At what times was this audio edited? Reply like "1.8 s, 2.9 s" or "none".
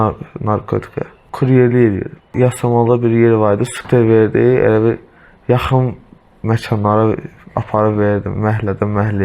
1.2 s, 2.3 s, 3.7 s